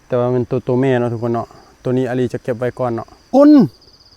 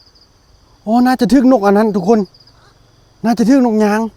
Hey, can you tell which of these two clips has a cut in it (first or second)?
first